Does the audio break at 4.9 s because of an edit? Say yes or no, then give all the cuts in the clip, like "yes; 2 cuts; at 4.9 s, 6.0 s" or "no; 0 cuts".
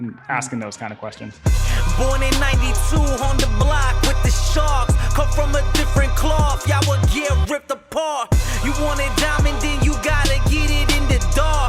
no; 1 cut; at 1.2 s